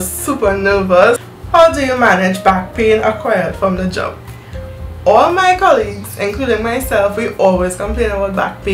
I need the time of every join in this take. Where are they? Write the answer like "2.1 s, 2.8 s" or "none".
1.2 s